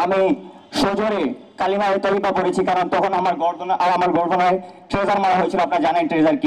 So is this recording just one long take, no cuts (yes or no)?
yes